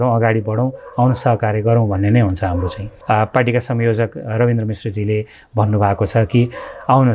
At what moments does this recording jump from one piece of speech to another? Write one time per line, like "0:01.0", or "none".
0:02.9